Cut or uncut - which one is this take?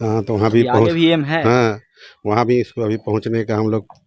uncut